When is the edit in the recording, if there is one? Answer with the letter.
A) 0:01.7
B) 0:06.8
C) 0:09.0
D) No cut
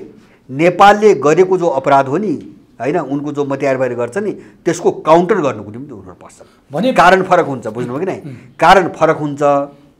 D